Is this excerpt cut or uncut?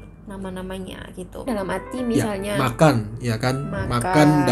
cut